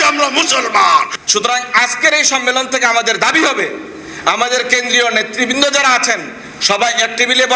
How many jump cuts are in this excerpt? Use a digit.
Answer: 1